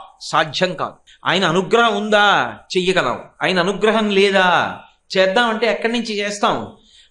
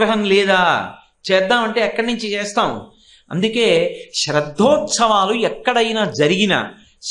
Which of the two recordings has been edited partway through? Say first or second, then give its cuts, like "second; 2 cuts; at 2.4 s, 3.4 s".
first; 1 cut; at 1.1 s